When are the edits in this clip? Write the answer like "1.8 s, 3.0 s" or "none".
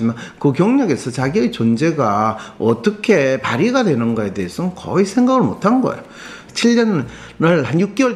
6.3 s